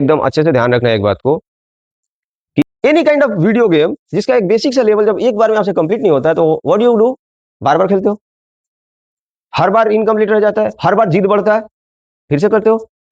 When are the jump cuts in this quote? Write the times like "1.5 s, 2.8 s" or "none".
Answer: 2.6 s